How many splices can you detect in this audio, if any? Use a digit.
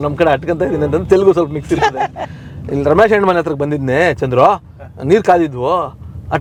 0